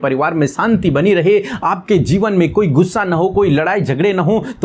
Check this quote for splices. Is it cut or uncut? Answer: uncut